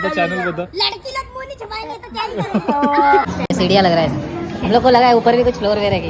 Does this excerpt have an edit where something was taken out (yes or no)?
yes